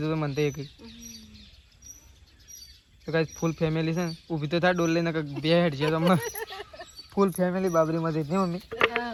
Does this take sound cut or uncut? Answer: uncut